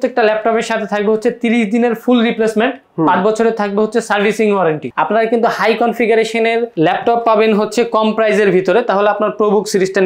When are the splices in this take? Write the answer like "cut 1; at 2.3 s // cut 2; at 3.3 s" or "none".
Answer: cut 1; at 4.8 s